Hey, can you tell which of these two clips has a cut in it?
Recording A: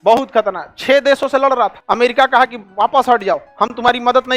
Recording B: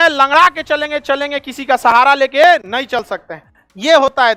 A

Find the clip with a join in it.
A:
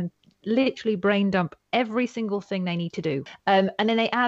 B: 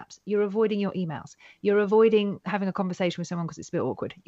A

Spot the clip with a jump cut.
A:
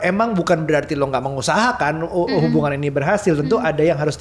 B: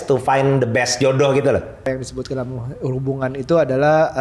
B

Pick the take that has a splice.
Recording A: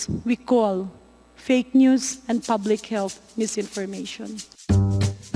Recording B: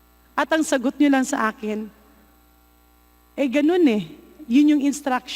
A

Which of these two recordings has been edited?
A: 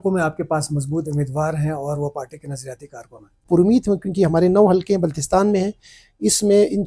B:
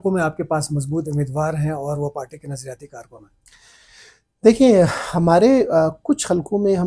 A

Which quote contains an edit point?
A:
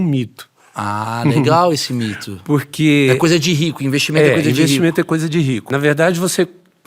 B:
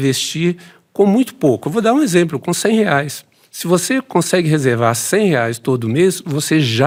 A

